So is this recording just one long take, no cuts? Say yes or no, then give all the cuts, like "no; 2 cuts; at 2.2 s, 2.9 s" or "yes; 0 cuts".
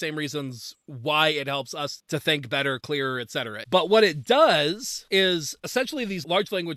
no; 2 cuts; at 4.9 s, 5.5 s